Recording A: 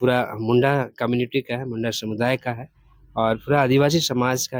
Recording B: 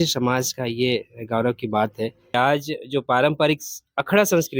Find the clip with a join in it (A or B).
B